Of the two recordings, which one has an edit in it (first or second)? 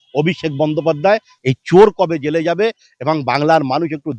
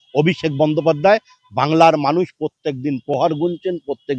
first